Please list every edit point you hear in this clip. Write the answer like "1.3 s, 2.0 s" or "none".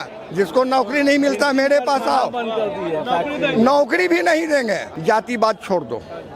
4.9 s